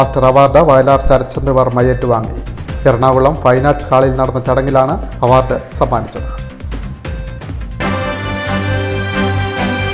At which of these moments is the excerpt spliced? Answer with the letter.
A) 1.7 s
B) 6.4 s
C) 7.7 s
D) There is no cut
C